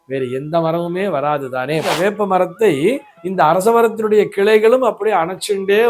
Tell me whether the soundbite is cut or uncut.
cut